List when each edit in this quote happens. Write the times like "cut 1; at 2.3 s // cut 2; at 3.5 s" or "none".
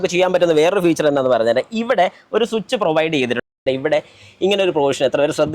cut 1; at 3.6 s